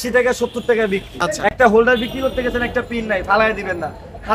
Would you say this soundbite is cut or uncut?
cut